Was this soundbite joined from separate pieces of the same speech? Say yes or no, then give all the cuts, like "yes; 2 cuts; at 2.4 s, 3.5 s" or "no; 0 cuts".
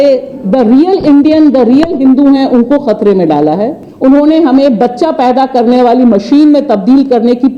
yes; 1 cut; at 3.8 s